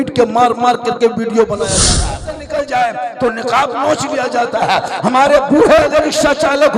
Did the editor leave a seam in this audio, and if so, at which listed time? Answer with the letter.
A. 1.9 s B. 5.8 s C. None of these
A